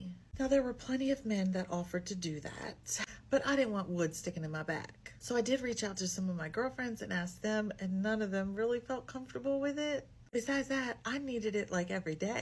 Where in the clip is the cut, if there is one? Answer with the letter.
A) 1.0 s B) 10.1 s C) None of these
C